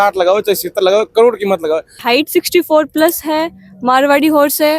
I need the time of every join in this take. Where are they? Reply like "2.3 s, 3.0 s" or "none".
2.0 s

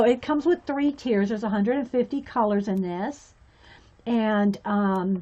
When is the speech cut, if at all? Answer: 3.2 s

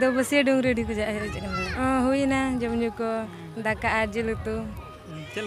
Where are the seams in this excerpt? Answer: 1.6 s

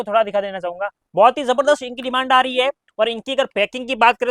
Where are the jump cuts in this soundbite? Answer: 0.9 s

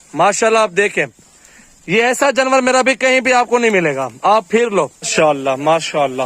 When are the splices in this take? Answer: 5.1 s

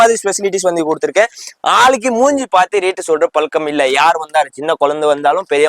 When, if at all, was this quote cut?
none

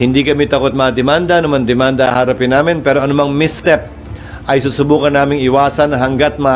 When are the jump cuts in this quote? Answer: none

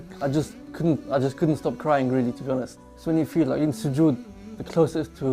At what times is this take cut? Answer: 2.9 s

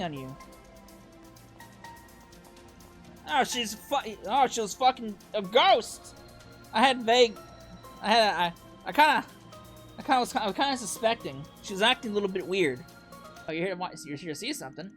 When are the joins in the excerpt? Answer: 13.4 s

